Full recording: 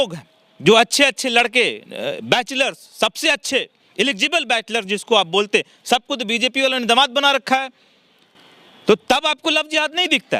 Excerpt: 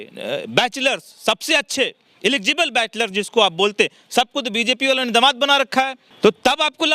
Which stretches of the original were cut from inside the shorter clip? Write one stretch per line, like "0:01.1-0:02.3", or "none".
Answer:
0:07.8-0:08.7